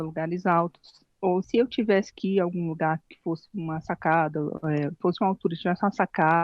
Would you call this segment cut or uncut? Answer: cut